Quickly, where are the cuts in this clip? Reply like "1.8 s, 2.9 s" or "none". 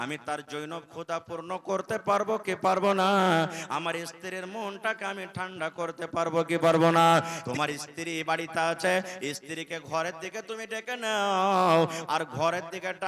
7.4 s